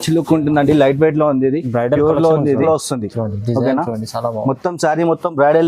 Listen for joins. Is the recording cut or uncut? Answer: cut